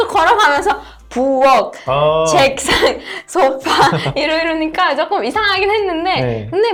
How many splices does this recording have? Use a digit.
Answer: 0